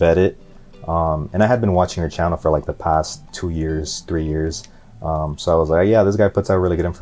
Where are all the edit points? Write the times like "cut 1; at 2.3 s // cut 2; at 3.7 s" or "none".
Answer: none